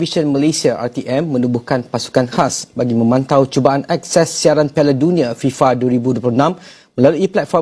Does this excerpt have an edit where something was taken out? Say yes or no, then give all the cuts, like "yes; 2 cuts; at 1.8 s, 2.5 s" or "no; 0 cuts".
no; 0 cuts